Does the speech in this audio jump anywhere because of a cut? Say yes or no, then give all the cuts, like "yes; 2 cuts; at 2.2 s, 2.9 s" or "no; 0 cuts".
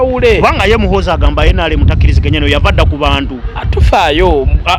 no; 0 cuts